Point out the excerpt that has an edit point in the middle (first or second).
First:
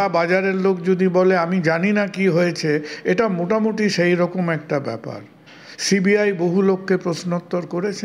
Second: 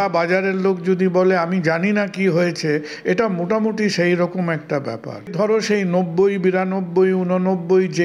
second